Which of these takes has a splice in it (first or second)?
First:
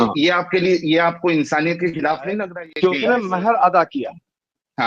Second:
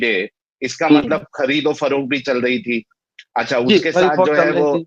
first